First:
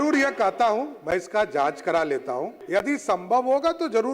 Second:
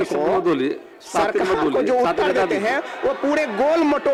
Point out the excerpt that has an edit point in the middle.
first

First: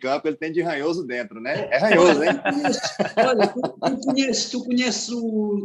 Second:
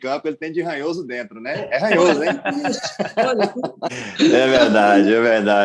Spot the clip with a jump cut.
second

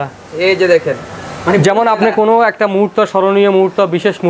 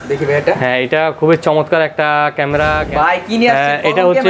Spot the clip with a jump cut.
second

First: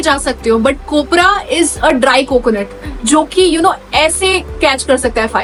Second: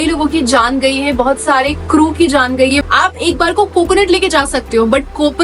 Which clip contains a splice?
second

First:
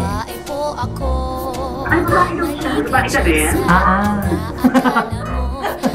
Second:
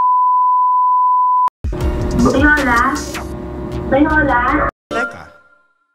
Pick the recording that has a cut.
second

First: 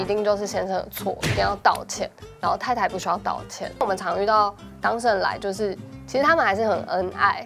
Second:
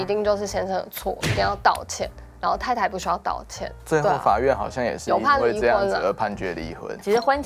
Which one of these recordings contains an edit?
first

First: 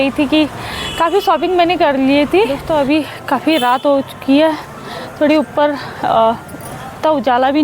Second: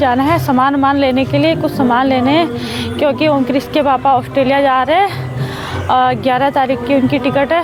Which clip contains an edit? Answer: first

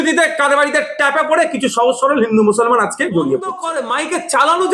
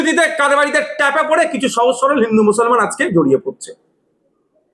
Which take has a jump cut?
first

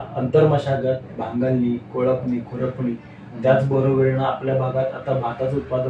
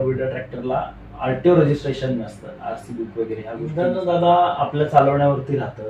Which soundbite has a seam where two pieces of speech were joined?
second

